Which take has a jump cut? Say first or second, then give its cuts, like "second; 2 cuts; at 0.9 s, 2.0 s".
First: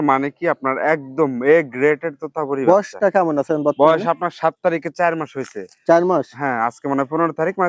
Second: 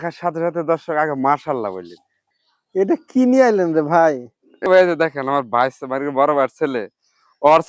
second; 2 cuts; at 2.2 s, 4.6 s